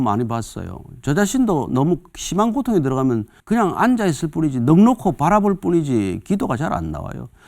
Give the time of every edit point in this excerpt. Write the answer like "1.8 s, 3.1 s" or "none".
3.3 s